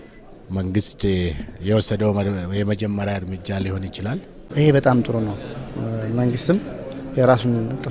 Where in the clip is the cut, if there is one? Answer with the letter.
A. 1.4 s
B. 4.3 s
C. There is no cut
B